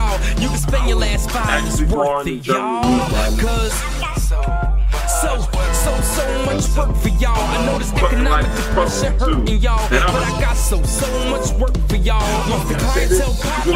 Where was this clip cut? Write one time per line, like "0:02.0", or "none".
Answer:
none

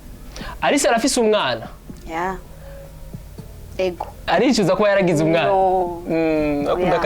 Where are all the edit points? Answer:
0:04.2

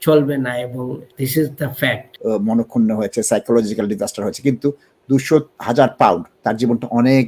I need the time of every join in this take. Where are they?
0:01.0
0:02.1
0:05.5

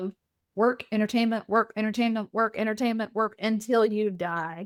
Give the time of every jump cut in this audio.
none

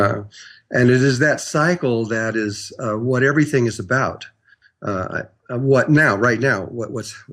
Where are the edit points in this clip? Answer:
none

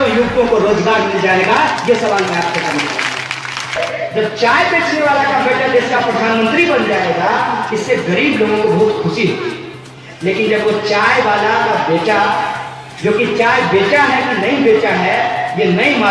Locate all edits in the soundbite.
0:03.8

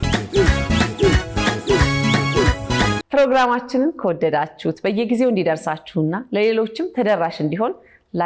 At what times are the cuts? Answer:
0:03.0

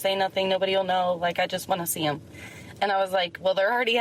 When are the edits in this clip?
none

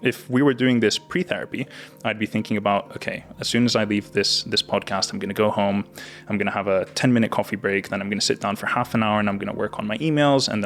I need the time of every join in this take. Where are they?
none

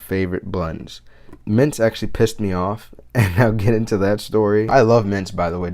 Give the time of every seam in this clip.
0:01.3
0:04.7

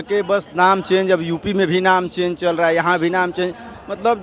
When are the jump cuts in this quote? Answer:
none

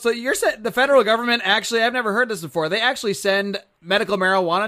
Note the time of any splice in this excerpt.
none

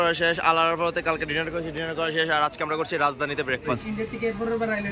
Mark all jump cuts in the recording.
0:03.8

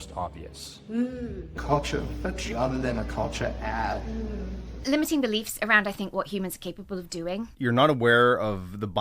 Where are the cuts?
0:01.6
0:04.7
0:07.5

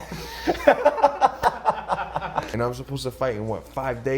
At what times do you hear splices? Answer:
0:02.5

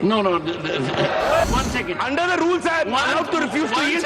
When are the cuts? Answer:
0:01.4

